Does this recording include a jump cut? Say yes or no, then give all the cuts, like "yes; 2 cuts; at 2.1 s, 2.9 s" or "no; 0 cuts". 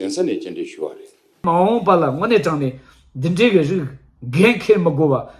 yes; 1 cut; at 1.4 s